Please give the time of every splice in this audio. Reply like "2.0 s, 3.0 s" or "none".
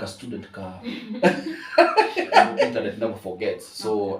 2.8 s